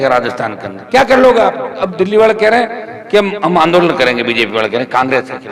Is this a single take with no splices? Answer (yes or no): no